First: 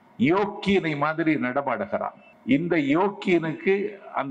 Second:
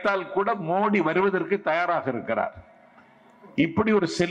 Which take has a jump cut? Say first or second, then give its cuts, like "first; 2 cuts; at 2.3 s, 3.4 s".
first; 1 cut; at 2.3 s